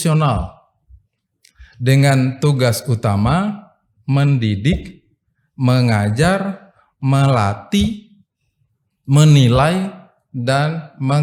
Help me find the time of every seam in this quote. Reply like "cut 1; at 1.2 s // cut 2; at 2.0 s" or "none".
none